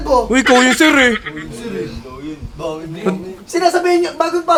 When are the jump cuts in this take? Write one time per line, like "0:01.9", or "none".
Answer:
none

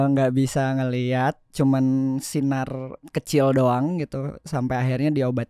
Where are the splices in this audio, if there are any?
0:03.0

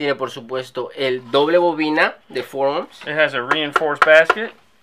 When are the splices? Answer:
0:01.2

